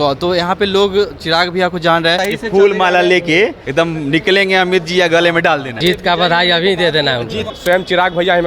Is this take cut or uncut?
cut